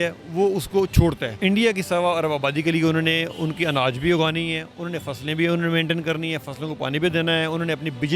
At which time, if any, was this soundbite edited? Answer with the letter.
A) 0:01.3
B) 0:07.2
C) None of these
A